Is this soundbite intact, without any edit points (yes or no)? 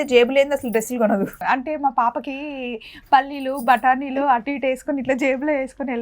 no